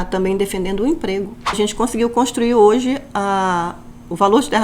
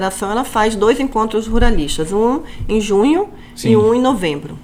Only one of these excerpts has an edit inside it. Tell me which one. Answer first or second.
first